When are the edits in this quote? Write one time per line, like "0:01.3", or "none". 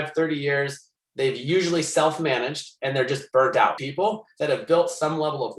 0:03.8